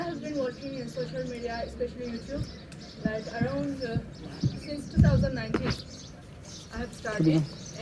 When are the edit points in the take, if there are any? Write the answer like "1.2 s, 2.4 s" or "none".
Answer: none